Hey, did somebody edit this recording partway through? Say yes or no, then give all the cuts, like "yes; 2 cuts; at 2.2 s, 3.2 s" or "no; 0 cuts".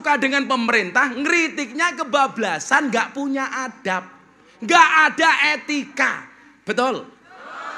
no; 0 cuts